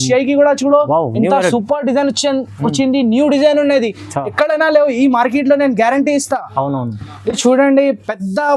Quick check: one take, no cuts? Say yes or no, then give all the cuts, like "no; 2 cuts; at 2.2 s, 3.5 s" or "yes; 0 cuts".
no; 1 cut; at 7.2 s